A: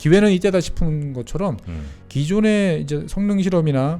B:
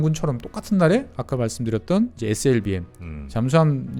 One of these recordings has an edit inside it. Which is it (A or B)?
B